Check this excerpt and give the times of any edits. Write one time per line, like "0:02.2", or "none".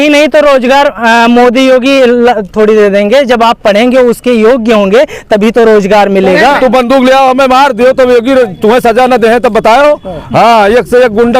0:06.4